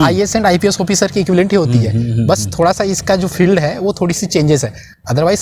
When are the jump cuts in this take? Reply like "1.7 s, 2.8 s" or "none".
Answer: none

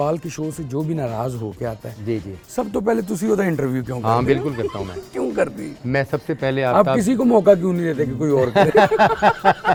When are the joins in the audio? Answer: none

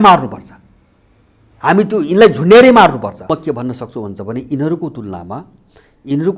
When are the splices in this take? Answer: 3.4 s

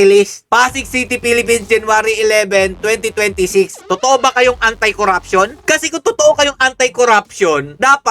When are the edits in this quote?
3.8 s

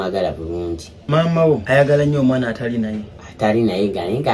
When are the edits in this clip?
0.9 s, 1.6 s

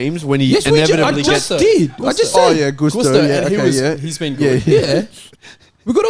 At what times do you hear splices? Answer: none

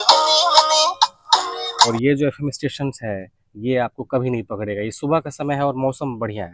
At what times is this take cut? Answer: 1.5 s

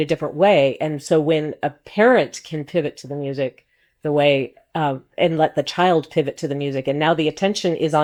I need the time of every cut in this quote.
none

